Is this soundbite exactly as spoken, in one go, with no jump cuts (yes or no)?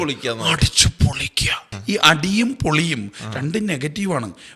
no